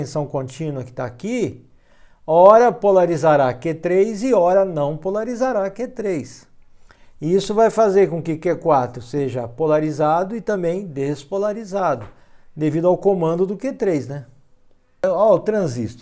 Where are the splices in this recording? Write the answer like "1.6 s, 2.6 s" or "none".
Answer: 15.0 s